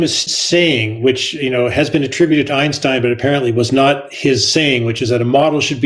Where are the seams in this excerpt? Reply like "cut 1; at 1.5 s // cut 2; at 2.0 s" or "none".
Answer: none